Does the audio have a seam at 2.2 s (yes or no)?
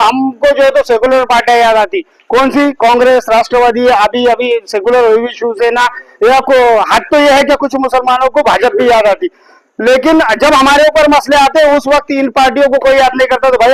no